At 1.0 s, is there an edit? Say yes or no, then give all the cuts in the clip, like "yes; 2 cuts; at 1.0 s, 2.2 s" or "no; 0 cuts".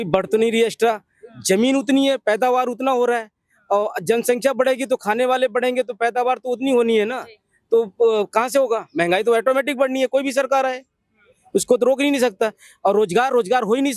no; 0 cuts